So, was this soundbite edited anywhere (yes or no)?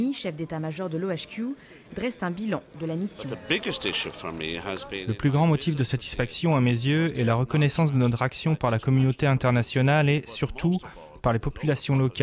yes